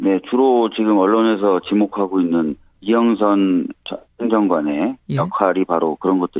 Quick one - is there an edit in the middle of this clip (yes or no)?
yes